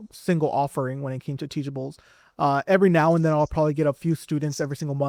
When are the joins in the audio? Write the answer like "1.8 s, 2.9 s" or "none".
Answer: none